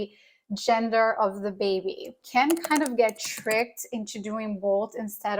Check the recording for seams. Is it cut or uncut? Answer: cut